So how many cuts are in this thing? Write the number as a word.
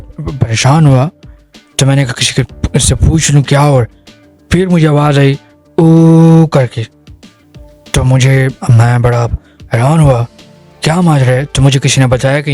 zero